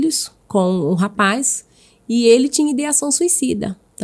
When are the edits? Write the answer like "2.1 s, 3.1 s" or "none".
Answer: none